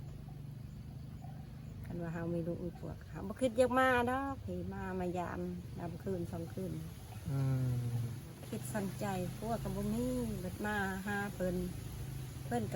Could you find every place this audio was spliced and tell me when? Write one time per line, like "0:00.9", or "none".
0:08.4